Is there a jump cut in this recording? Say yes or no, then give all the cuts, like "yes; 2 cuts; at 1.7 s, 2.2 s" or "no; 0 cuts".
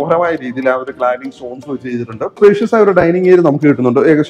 yes; 1 cut; at 2.3 s